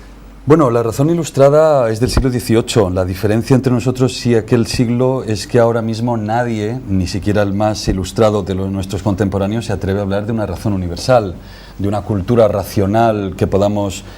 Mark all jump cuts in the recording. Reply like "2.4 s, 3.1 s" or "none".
5.1 s